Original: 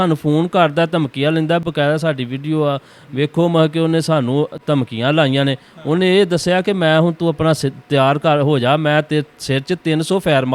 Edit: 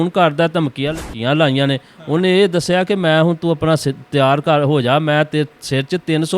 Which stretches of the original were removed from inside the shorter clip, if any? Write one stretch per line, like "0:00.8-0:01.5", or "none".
0:01.4-0:04.8